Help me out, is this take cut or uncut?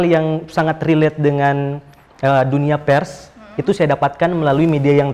uncut